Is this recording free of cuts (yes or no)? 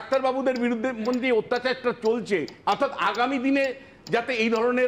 no